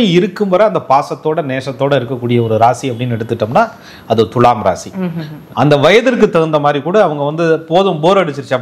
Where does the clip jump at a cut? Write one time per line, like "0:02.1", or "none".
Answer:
none

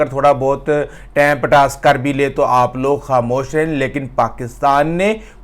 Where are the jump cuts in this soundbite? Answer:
none

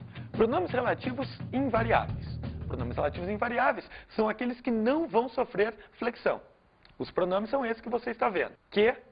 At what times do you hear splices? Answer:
none

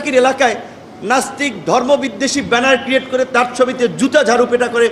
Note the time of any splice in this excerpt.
none

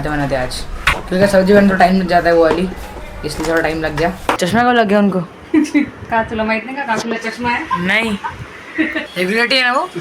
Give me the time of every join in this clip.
0:00.9
0:04.4
0:09.1

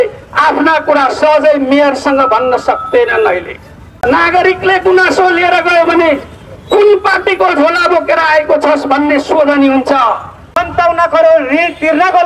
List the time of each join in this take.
0:04.0
0:10.6

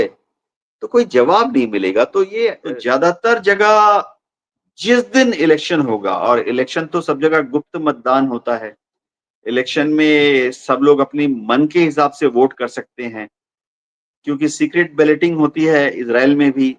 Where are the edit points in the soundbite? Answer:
0:02.6

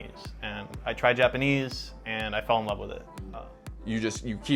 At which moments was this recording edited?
0:03.4

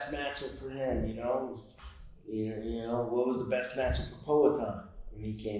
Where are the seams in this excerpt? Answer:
none

